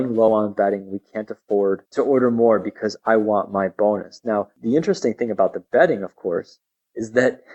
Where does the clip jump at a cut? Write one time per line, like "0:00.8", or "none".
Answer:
0:01.9
0:04.5

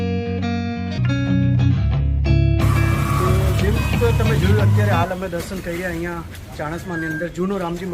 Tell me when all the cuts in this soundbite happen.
0:01.0

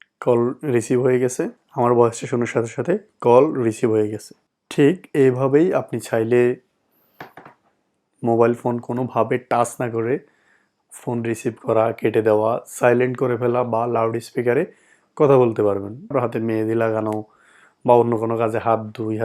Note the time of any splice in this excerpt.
0:01.6
0:16.1

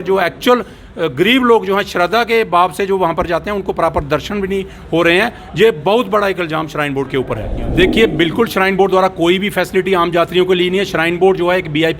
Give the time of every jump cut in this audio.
0:07.6

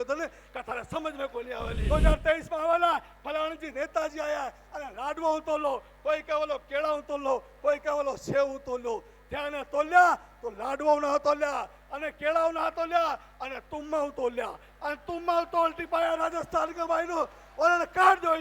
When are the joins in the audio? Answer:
0:01.8

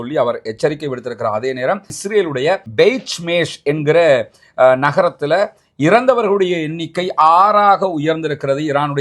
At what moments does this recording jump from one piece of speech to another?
0:02.0

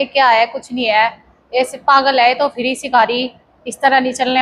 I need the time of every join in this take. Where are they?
none

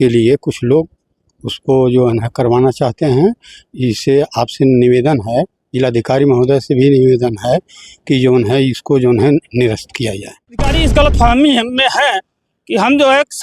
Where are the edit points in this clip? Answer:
0:10.7

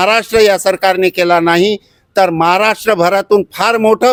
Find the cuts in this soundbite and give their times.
none

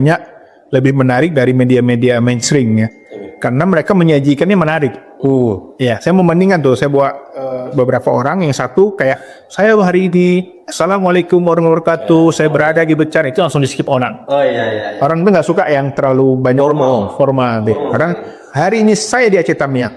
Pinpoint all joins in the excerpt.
none

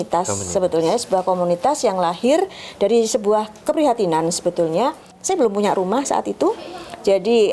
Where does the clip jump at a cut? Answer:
0:05.2

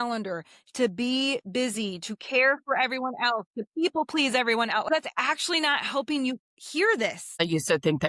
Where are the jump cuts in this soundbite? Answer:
0:04.9
0:06.6
0:07.4

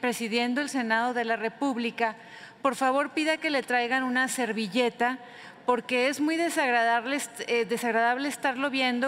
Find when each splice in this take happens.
none

